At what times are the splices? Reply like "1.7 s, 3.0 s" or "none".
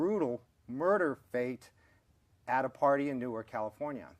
1.2 s